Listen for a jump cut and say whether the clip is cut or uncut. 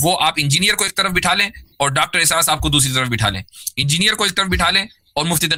uncut